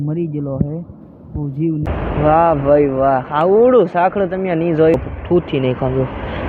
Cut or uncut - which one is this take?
cut